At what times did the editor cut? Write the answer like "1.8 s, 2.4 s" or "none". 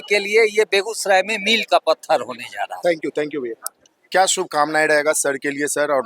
none